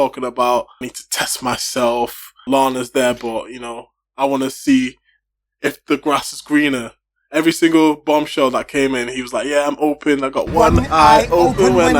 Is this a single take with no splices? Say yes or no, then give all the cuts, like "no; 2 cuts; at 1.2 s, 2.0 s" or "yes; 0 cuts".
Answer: no; 2 cuts; at 1.0 s, 2.4 s